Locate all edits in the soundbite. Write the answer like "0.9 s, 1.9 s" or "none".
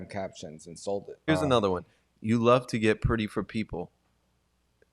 1.3 s